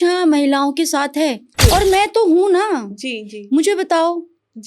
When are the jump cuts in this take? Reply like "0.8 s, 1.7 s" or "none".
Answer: 1.5 s